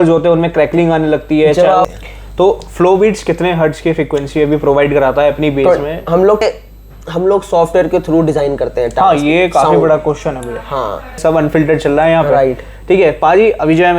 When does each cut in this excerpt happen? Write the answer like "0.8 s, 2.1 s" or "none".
1.9 s, 6.4 s, 11.2 s

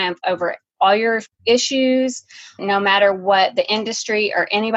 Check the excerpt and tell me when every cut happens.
0.9 s, 2.6 s

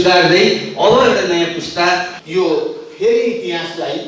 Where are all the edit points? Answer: 2.2 s

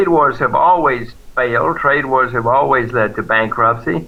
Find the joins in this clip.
none

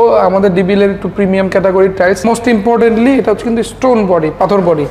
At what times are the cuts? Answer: 2.2 s

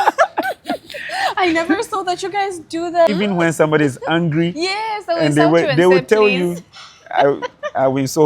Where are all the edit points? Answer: 3.1 s

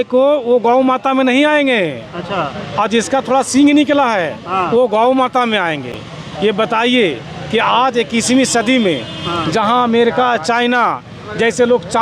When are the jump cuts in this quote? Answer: none

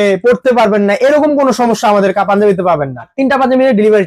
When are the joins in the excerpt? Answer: 3.1 s

